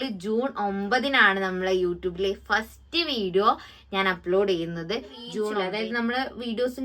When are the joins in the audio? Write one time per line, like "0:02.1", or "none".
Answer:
0:05.5